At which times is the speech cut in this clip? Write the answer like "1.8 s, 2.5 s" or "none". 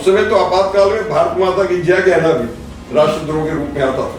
none

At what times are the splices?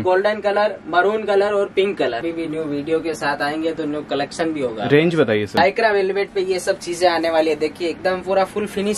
2.3 s, 5.6 s

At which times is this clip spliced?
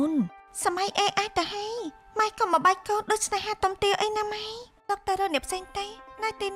4.8 s

